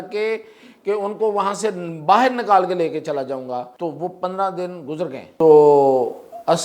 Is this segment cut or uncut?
cut